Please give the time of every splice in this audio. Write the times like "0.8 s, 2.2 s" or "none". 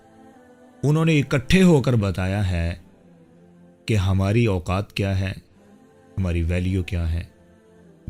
none